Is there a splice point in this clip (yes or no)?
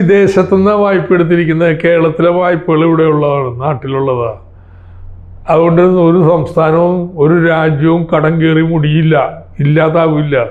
no